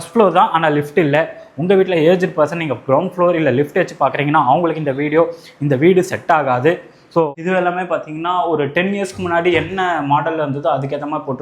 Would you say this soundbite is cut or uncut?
cut